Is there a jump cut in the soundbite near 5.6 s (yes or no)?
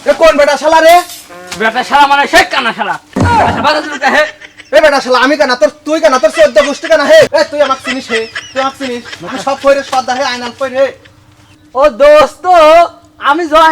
no